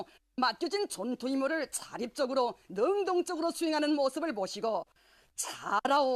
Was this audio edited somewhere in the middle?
yes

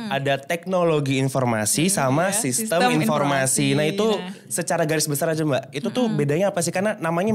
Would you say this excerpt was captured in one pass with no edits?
yes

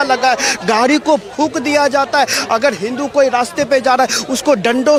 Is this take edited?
no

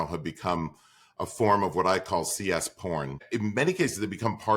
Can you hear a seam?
yes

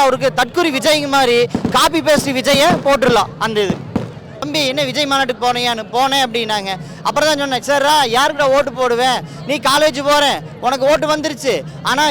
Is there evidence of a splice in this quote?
yes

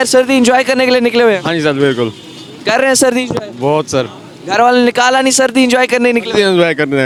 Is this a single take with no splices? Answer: yes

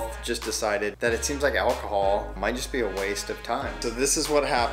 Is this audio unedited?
no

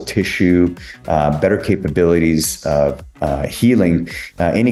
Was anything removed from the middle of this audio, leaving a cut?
no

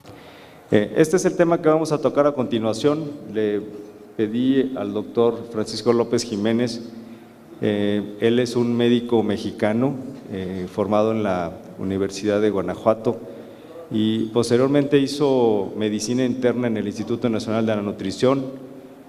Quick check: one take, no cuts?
yes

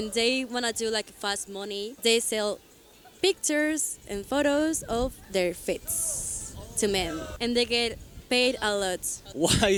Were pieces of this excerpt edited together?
no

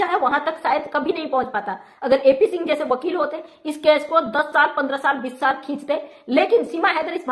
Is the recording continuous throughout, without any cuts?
yes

